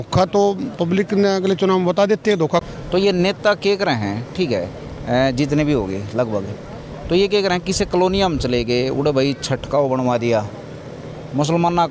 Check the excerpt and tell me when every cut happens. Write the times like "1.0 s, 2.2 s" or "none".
2.6 s